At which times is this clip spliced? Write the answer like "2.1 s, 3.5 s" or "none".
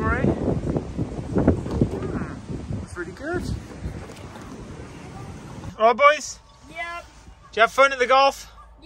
5.7 s

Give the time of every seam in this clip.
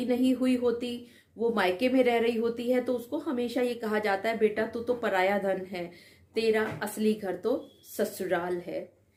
none

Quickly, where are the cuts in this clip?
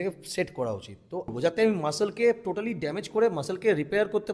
1.3 s

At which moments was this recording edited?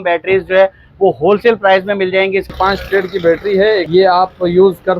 2.5 s, 3.9 s

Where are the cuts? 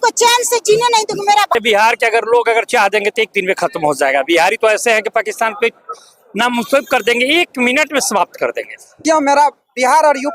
1.5 s, 9.0 s

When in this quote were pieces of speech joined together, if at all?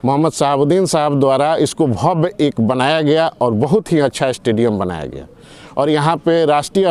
none

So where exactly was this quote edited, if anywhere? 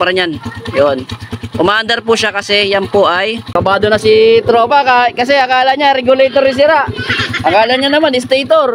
3.5 s

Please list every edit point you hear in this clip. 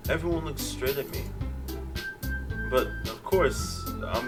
none

